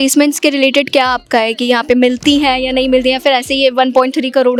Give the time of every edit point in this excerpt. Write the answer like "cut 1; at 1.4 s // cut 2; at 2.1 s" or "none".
none